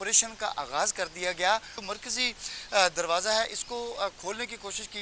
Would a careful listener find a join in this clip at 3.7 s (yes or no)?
no